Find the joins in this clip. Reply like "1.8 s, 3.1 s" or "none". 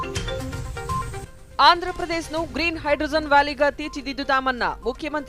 1.0 s